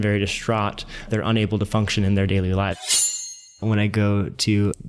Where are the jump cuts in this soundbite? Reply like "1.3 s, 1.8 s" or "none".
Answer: 3.3 s